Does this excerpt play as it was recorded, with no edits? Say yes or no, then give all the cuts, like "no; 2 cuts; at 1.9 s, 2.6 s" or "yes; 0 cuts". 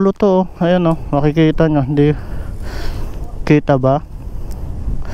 yes; 0 cuts